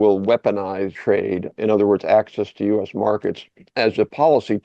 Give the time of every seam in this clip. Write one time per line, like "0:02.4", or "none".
0:01.3